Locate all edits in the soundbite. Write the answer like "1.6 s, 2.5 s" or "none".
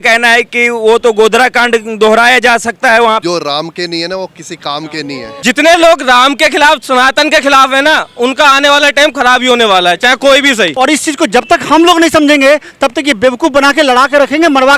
3.2 s, 5.4 s, 10.7 s